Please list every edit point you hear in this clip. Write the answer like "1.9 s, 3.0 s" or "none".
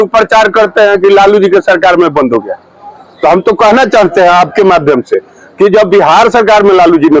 none